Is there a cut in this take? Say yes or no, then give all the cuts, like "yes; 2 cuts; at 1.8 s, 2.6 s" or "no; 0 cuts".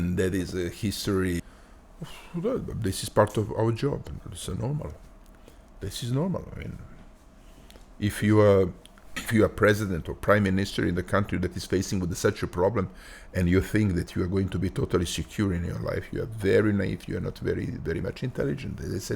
yes; 2 cuts; at 1.4 s, 9.2 s